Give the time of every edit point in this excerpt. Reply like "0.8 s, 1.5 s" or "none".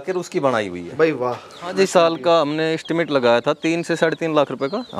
1.7 s